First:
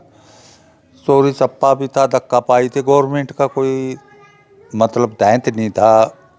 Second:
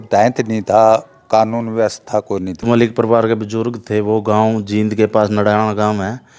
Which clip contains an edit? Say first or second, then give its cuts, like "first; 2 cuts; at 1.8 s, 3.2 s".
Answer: second; 1 cut; at 2.6 s